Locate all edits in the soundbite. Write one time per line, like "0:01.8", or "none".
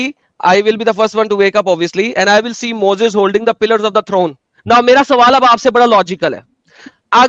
0:04.6